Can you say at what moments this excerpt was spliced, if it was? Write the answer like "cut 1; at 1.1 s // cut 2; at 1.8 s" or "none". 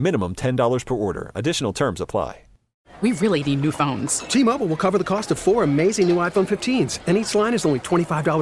cut 1; at 2.8 s